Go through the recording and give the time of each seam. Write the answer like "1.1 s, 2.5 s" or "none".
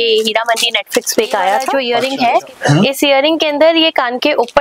1.7 s